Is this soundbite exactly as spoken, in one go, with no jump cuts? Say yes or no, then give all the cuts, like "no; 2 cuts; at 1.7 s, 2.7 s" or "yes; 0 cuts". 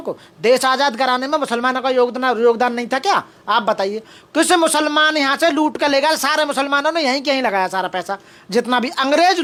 yes; 0 cuts